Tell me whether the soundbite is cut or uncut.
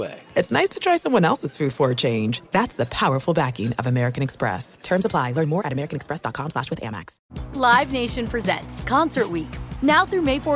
cut